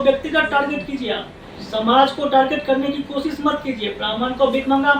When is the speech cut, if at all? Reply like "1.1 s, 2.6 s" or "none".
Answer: none